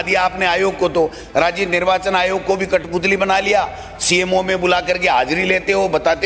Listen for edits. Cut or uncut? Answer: uncut